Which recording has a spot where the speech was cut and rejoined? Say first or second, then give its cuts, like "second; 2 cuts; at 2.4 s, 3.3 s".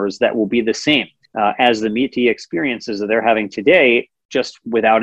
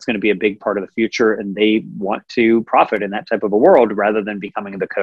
first; 1 cut; at 1.2 s